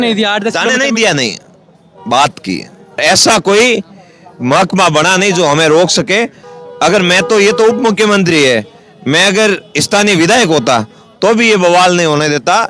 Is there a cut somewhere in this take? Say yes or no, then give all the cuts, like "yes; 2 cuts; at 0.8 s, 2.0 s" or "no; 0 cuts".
yes; 2 cuts; at 3.2 s, 6.4 s